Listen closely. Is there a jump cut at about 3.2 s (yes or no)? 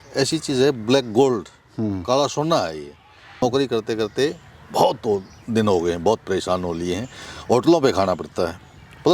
yes